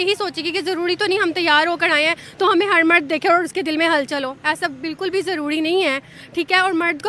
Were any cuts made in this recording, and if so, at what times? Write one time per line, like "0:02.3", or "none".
none